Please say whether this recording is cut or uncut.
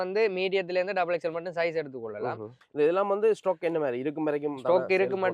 cut